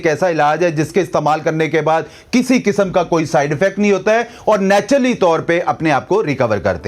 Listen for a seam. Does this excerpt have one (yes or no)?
no